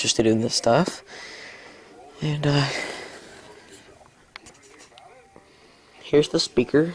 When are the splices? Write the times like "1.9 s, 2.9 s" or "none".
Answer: none

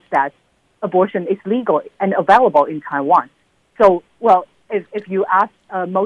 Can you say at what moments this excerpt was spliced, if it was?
none

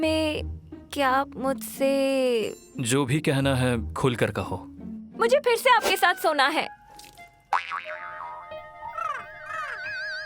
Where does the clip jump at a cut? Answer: 2.7 s

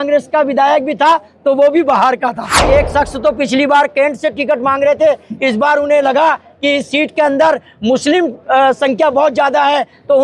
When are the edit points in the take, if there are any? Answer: 2.6 s

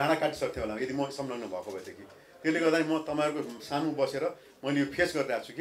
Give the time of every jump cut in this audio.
none

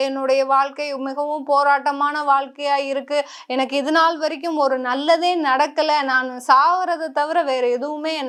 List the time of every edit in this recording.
none

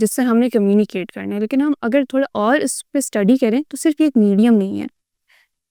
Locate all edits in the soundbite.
none

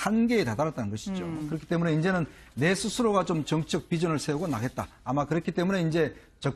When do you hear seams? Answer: 3.8 s

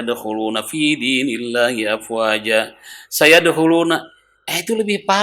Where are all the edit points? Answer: none

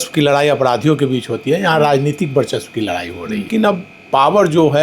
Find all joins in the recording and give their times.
3.5 s

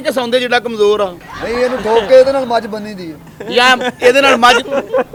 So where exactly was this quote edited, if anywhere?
none

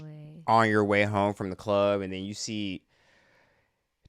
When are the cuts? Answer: none

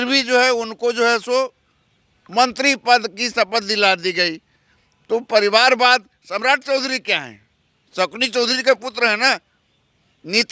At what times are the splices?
none

